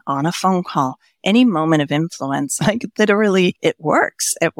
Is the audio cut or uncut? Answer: cut